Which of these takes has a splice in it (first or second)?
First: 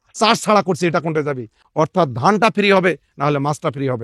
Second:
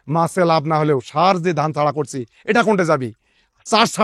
first